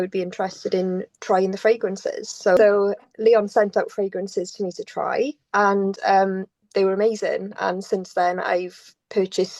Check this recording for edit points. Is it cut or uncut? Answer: cut